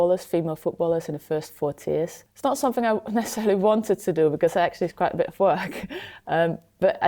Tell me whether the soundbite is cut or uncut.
cut